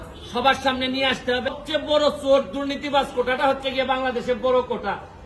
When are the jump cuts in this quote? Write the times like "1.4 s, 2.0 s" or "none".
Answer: 1.5 s